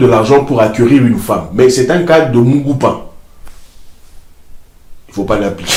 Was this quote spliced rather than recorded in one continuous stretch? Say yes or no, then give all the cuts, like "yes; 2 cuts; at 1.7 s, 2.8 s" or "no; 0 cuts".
no; 0 cuts